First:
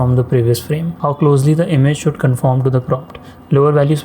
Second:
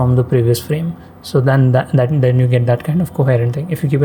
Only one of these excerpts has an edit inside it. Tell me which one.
first; 1 cut; at 0.9 s

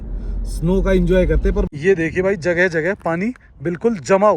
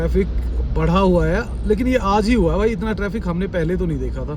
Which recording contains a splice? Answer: first; 1 cut; at 1.7 s

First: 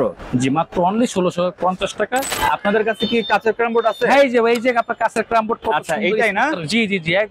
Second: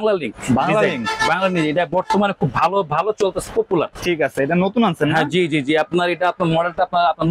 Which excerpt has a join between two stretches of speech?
first; 1 cut; at 2.3 s

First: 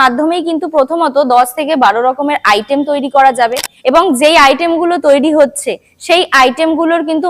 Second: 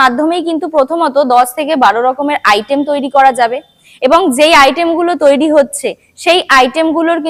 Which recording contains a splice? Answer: first; 1 cut; at 3.7 s

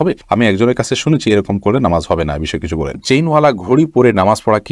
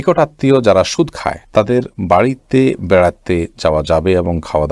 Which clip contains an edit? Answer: first; 1 cut; at 3.0 s

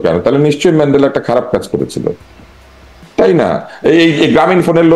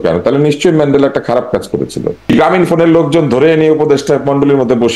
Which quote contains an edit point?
second; 1 cut; at 2.3 s

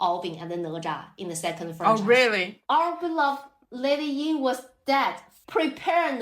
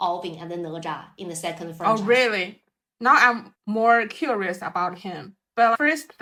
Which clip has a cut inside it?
first; 2 cuts; at 2.5 s, 5.3 s

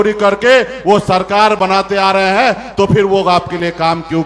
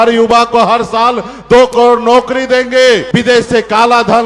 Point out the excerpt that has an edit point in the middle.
second; 1 cut; at 3.1 s

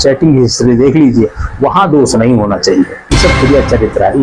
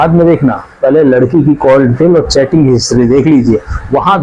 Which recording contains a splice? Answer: first; 1 cut; at 3.1 s

